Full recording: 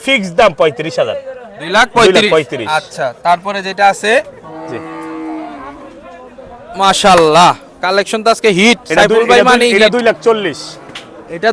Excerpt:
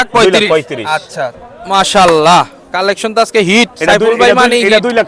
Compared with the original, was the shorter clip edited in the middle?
yes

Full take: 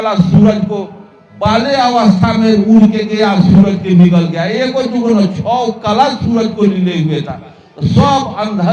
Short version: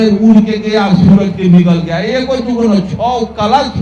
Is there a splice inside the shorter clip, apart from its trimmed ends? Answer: no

